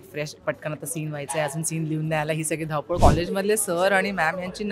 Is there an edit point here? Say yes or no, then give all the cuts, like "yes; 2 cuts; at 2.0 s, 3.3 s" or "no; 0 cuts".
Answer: yes; 1 cut; at 3.0 s